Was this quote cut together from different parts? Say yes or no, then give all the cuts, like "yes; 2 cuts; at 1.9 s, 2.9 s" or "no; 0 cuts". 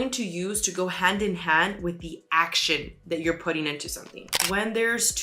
yes; 1 cut; at 4.3 s